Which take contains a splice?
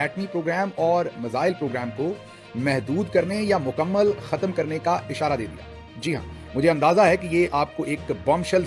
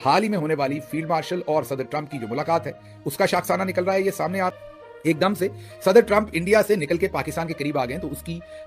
second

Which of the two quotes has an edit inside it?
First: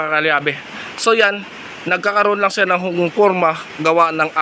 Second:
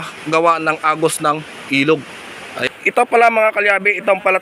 second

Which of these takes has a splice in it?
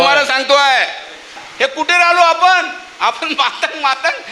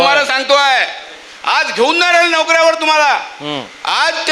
first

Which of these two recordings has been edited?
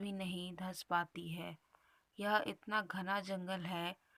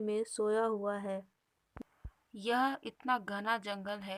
second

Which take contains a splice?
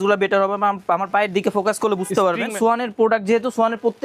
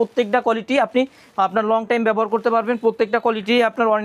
first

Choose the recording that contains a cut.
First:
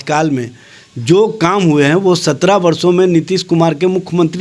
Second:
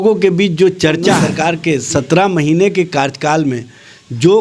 second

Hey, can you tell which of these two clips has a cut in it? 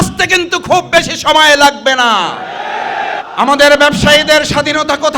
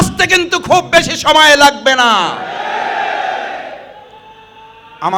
first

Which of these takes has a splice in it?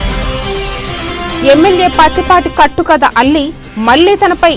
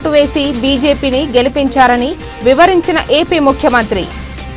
first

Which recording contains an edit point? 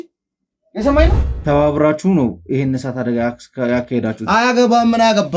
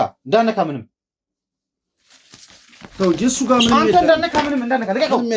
first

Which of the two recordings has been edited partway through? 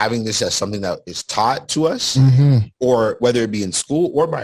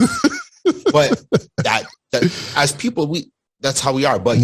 first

